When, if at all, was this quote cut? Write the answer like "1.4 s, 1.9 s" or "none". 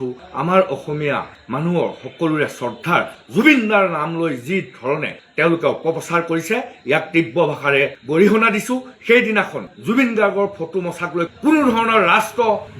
11.3 s